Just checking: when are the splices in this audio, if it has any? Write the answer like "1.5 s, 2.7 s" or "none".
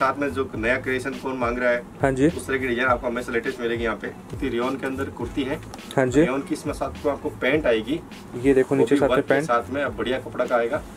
4.2 s

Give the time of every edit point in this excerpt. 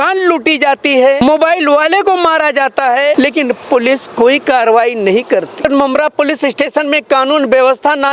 1.2 s, 3.1 s, 5.6 s

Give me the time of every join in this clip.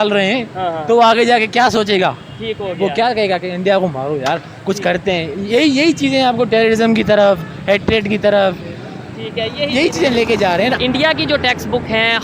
10.8 s

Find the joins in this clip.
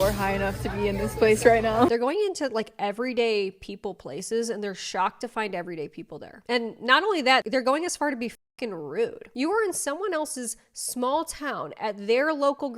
1.9 s, 9.3 s

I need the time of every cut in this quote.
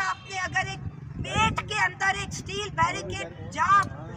none

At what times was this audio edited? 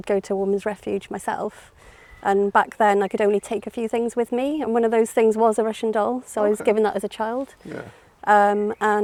none

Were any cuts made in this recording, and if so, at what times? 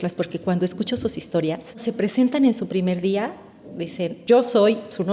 1.8 s, 4.2 s

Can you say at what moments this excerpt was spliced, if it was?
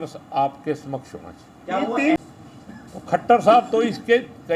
2.2 s

